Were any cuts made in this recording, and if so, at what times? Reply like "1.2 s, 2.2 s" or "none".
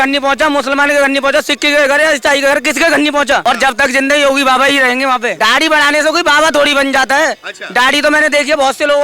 3.4 s, 5.3 s